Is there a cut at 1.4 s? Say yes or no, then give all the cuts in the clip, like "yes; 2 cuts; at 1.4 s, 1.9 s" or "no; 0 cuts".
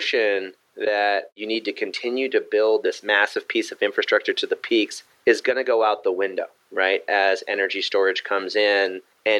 yes; 1 cut; at 1.4 s